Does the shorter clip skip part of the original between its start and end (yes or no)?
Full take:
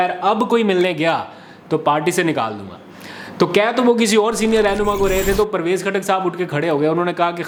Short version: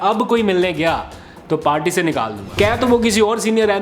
yes